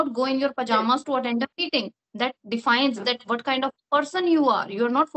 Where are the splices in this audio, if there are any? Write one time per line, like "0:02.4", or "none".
none